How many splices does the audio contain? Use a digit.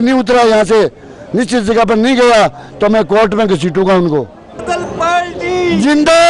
1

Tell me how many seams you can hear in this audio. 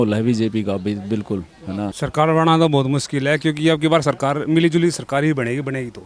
1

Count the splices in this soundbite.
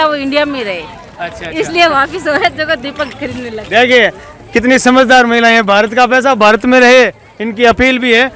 0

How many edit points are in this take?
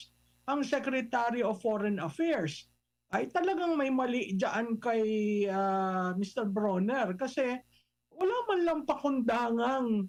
0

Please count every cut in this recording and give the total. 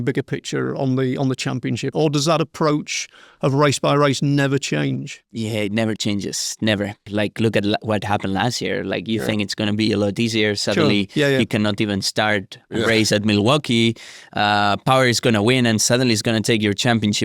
2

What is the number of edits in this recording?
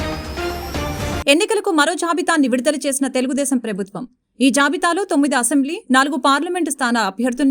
0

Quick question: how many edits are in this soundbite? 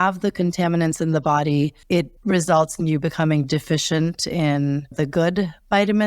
2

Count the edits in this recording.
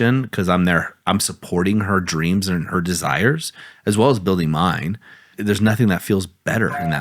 1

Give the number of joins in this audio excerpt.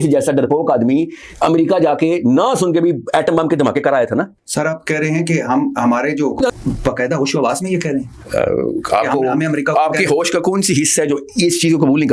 1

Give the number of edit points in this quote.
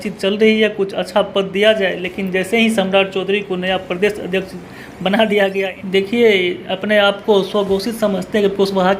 1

